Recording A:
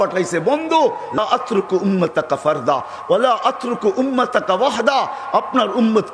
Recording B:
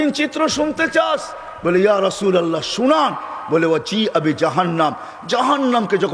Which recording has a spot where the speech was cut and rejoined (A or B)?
A